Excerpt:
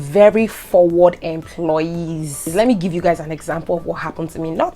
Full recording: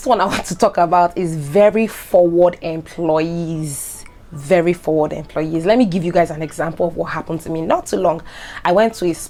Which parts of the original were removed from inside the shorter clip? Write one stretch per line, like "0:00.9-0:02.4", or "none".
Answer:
0:03.9-0:05.6